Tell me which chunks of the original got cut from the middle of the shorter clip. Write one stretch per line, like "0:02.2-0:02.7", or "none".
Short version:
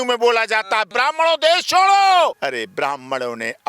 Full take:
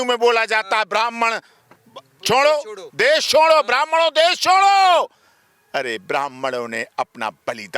0:00.9-0:03.6
0:05.1-0:05.7